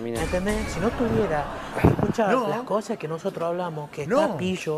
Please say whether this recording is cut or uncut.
uncut